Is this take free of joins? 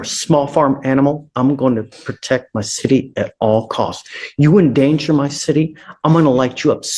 yes; 0 cuts

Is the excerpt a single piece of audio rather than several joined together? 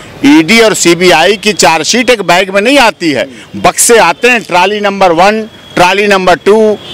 yes; 0 cuts

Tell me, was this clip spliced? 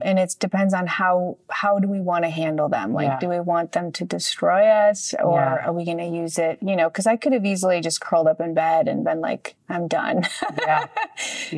no; 0 cuts

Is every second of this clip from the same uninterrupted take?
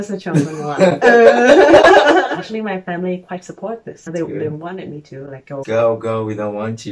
no; 3 cuts; at 2.3 s, 3.9 s, 5.6 s

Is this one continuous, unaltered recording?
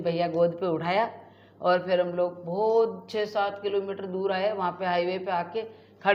yes; 0 cuts

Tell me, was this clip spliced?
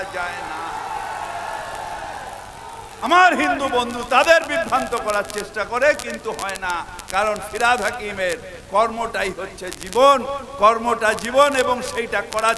yes; 1 cut; at 3.1 s

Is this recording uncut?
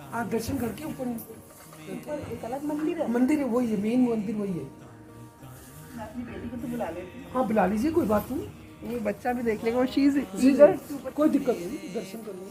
yes; 0 cuts

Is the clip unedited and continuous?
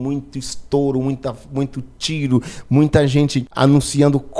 no; 1 cut; at 3.4 s

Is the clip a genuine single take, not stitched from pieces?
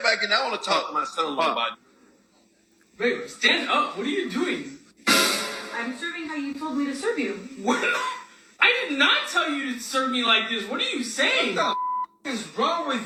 yes; 0 cuts

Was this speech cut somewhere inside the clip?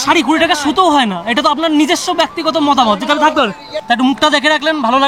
no; 0 cuts

